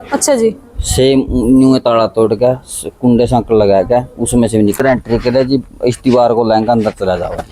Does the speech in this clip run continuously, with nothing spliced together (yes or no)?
no